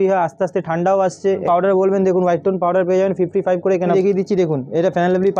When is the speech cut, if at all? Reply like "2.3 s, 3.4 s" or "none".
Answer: 1.4 s, 3.9 s